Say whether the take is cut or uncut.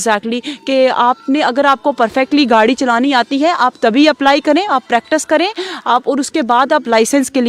uncut